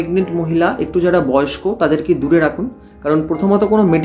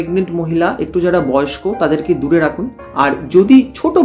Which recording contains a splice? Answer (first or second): second